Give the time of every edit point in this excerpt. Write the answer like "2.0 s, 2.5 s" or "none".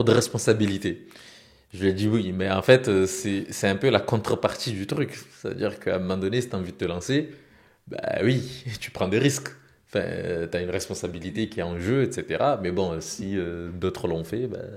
none